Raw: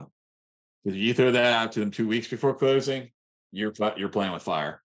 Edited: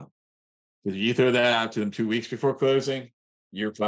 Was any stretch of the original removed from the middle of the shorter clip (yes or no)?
no